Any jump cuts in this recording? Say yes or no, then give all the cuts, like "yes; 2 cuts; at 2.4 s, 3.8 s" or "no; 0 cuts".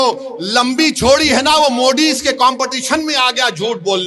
no; 0 cuts